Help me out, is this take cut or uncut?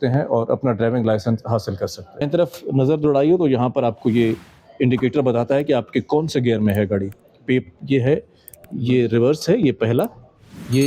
uncut